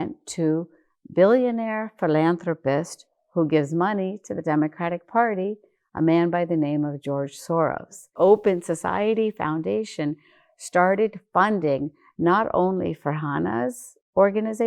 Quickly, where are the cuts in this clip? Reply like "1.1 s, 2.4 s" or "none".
8.1 s